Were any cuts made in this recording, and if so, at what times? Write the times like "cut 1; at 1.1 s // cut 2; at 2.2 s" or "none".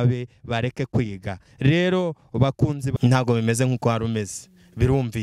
cut 1; at 2.9 s